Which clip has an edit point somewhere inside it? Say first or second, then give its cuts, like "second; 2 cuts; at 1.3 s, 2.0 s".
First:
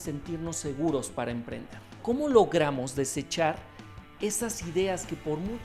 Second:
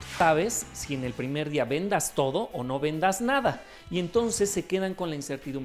first; 1 cut; at 2.0 s